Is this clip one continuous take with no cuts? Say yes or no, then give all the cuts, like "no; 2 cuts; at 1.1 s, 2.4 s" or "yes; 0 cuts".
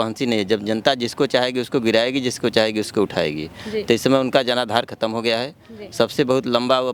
yes; 0 cuts